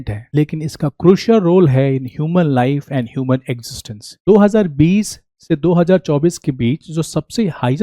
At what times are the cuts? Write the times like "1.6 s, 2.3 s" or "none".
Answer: 4.0 s

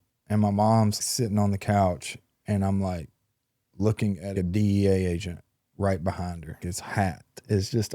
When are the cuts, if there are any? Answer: 1.0 s, 4.3 s, 6.6 s

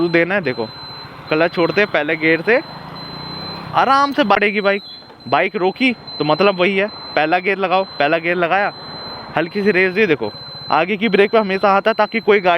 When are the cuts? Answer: 4.4 s

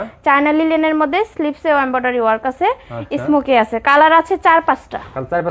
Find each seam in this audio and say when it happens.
none

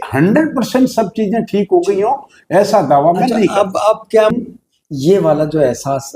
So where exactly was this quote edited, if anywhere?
4.3 s

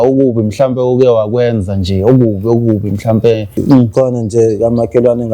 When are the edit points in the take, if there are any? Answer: 3.5 s

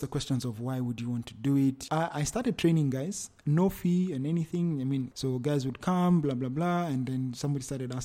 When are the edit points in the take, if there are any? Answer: 1.8 s, 5.1 s

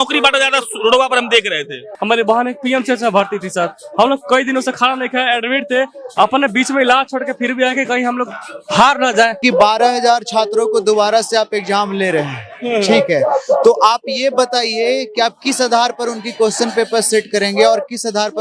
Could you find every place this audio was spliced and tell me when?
1.9 s, 9.4 s

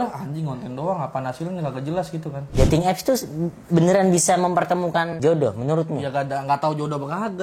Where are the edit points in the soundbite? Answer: 2.4 s, 5.2 s

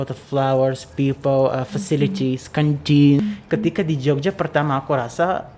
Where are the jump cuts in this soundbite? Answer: 3.2 s

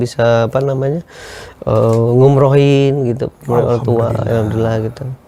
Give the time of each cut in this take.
none

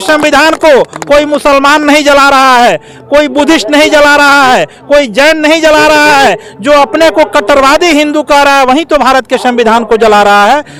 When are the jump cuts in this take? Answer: none

